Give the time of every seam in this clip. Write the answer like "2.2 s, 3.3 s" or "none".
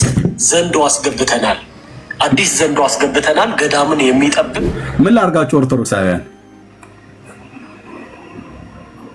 4.6 s